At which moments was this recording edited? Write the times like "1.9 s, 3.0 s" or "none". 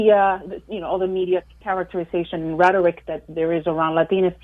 1.5 s